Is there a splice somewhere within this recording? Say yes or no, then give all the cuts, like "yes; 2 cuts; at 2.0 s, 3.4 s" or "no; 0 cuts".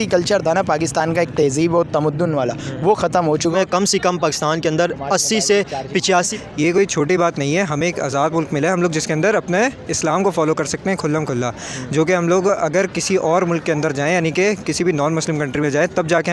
yes; 2 cuts; at 3.6 s, 6.3 s